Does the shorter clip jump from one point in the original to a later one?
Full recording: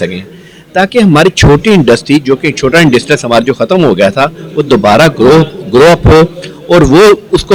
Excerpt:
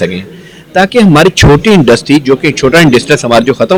no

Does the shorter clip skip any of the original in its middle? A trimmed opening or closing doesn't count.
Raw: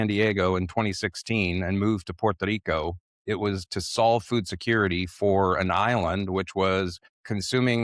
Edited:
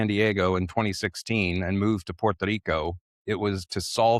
no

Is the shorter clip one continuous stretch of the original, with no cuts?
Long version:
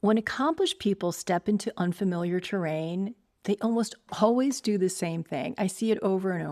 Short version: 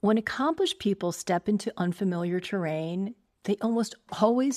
yes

